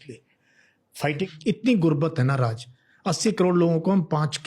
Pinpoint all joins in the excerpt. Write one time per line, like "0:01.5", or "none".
0:01.2